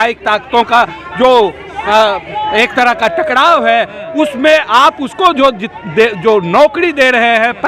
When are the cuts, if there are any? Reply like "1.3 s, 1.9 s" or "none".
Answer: none